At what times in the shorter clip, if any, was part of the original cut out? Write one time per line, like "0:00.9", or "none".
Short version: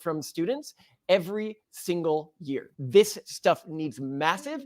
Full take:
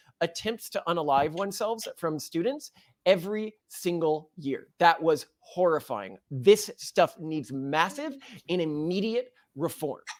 0:02.7